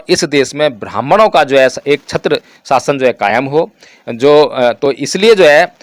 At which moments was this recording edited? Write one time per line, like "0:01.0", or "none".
none